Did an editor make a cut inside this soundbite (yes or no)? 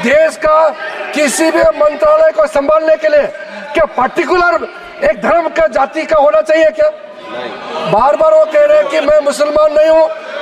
no